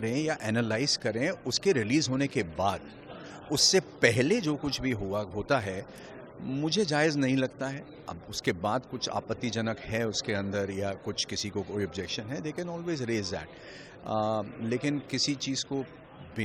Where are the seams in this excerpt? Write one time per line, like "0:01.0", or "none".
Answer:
none

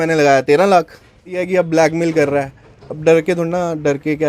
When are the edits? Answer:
0:01.3

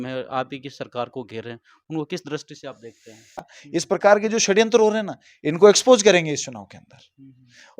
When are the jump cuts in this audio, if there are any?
0:03.6

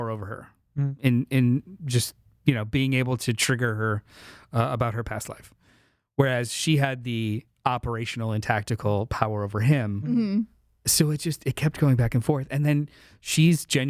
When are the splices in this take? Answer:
0:07.5

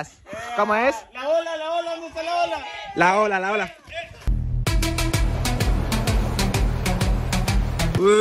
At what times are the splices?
none

